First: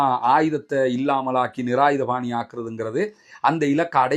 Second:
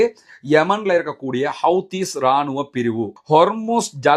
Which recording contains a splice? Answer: second; 1 cut; at 3.2 s

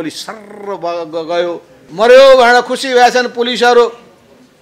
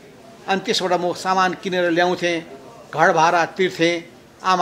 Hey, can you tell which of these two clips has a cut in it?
first; 1 cut; at 1.8 s

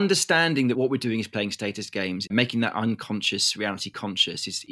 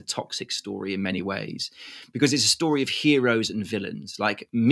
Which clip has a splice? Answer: first; 2 cuts; at 0.7 s, 2.3 s

